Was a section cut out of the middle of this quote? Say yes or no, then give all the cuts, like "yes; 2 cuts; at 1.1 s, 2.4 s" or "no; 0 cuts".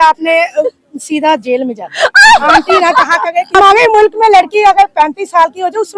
yes; 1 cut; at 3.5 s